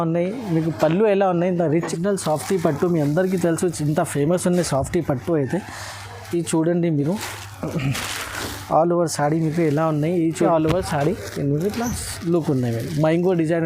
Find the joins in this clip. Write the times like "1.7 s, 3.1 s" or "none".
1.9 s, 10.5 s